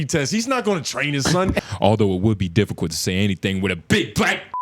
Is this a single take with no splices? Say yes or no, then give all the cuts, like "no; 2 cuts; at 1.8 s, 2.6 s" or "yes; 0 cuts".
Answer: no; 1 cut; at 1.6 s